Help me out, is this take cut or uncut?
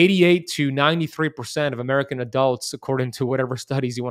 uncut